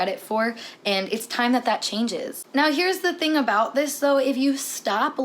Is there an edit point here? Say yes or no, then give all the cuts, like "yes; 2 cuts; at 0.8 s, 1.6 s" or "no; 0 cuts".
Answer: yes; 1 cut; at 2.4 s